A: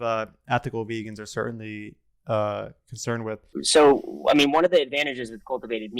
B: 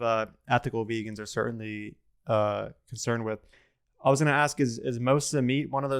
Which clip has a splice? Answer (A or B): A